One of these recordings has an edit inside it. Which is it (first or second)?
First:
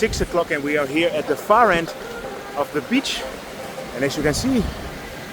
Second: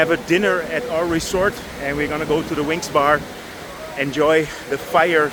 first